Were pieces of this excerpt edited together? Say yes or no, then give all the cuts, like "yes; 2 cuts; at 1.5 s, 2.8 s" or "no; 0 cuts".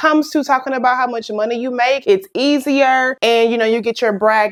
no; 0 cuts